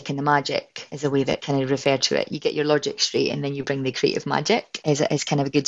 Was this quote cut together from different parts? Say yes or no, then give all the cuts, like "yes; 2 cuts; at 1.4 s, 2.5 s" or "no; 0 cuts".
yes; 2 cuts; at 1.2 s, 4.7 s